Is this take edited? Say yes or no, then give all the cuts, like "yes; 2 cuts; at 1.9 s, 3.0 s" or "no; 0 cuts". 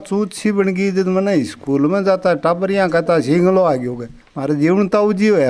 no; 0 cuts